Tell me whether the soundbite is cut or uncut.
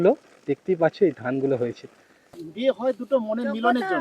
cut